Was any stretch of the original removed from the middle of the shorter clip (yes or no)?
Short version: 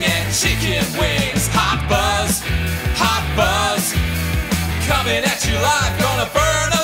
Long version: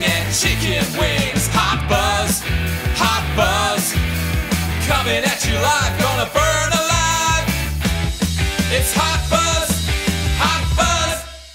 no